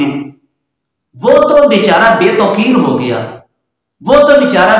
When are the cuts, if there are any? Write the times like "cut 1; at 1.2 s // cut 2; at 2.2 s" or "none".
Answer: none